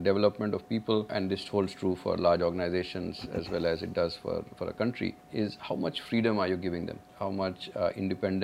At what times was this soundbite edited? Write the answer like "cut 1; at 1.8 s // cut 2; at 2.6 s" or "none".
cut 1; at 1.1 s // cut 2; at 5.2 s // cut 3; at 7.1 s